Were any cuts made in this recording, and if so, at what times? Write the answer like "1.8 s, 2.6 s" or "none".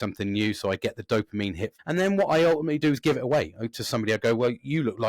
1.7 s